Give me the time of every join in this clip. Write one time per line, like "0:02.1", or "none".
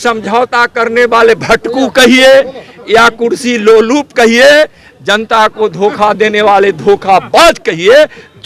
none